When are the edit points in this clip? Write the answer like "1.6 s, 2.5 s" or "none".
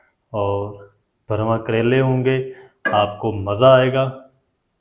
none